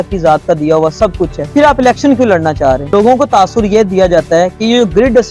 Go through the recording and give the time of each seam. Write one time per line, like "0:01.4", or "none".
0:01.4
0:02.8